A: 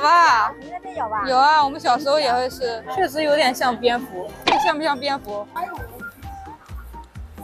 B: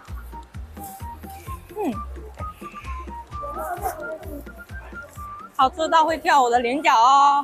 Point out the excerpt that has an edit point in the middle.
A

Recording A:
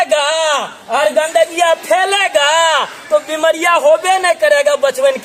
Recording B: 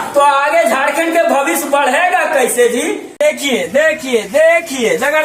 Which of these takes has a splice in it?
B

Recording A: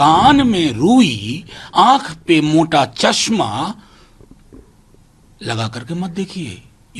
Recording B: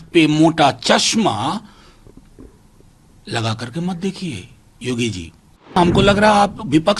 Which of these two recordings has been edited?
B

